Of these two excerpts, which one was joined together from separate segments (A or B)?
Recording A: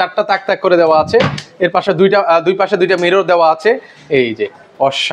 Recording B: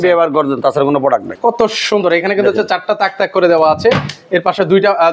B